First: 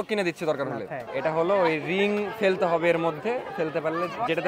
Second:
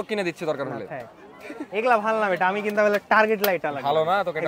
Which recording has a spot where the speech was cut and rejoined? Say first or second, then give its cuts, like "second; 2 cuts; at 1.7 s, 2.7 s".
first; 1 cut; at 1.0 s